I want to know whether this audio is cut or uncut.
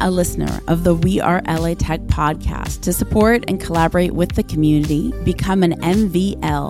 uncut